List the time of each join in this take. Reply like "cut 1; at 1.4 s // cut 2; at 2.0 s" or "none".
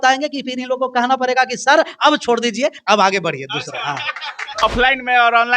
cut 1; at 4.6 s